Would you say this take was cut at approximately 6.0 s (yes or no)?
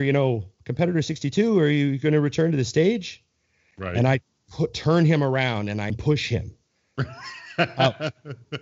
yes